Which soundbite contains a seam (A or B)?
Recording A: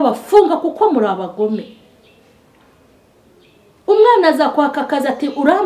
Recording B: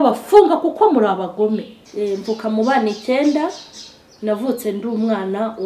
B